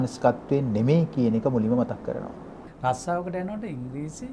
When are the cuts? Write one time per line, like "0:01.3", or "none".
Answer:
0:02.6